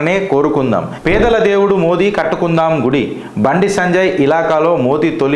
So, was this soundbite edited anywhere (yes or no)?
yes